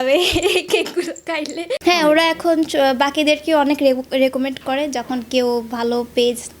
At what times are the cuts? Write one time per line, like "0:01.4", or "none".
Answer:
none